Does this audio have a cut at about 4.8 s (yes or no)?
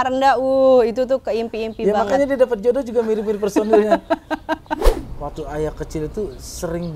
yes